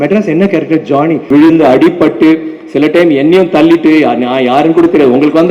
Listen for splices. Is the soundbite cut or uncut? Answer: cut